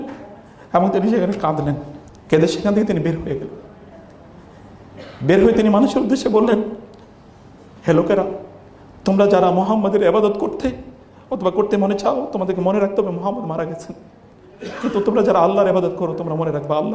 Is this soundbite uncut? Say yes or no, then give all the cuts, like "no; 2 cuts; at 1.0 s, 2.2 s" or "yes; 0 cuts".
yes; 0 cuts